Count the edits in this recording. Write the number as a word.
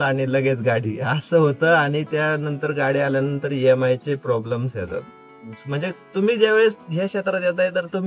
one